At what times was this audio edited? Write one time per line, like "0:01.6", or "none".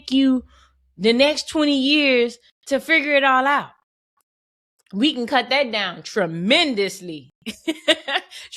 none